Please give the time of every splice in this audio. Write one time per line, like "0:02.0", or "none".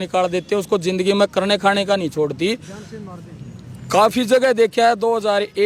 none

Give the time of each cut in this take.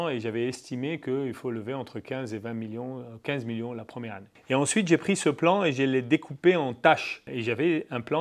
none

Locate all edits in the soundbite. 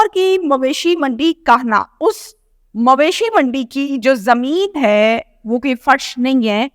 0:01.9

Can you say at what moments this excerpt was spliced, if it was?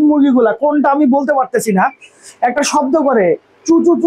none

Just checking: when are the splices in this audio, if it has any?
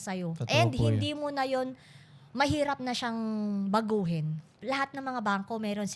0:04.5

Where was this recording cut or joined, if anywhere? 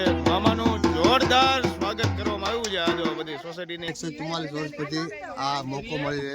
0:03.9

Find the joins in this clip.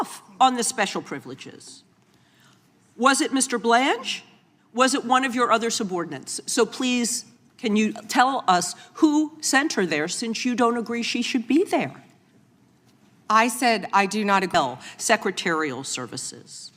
0:14.5

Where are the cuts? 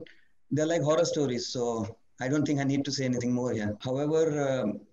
0:03.8

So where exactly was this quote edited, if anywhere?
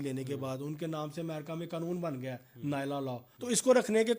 0:03.3

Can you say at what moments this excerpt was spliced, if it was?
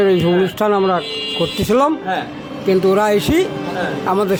none

